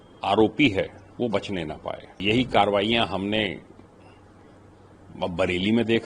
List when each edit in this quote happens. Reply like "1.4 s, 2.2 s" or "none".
2.2 s